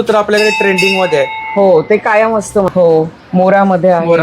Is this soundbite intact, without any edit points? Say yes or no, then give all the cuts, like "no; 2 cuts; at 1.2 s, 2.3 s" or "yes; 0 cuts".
no; 1 cut; at 2.7 s